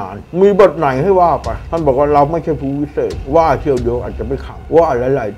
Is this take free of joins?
yes; 0 cuts

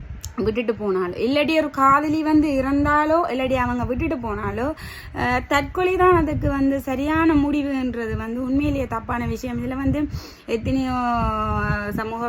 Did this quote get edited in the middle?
no; 0 cuts

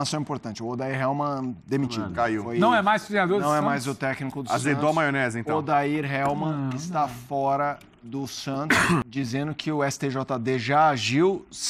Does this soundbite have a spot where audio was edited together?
yes; 1 cut; at 9.1 s

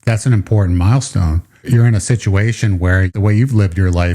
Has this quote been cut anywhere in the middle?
yes; 2 cuts; at 1.6 s, 3.1 s

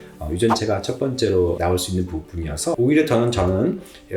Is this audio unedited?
no; 1 cut; at 2.8 s

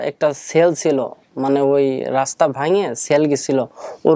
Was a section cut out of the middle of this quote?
no; 0 cuts

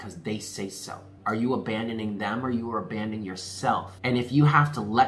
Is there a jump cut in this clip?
yes; 2 cuts; at 1.1 s, 3.9 s

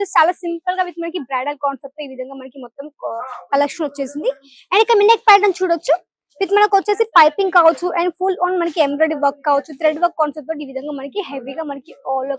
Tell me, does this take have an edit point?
no; 0 cuts

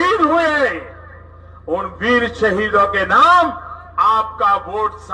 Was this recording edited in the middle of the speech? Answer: no; 0 cuts

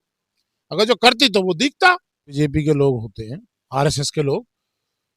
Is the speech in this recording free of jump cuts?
no; 1 cut; at 2.4 s

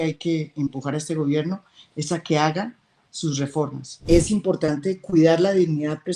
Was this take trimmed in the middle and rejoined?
yes; 1 cut; at 3.9 s

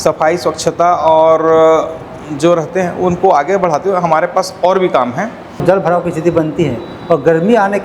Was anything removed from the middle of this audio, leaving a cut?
yes; 1 cut; at 5.6 s

